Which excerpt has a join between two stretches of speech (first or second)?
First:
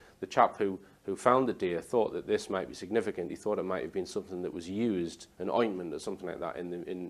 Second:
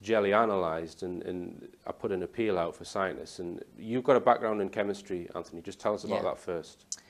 first